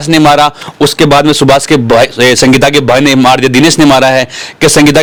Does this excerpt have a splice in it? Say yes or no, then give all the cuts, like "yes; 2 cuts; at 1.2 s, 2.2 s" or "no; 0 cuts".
no; 0 cuts